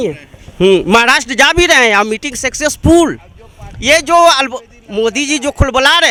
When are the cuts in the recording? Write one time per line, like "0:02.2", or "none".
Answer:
none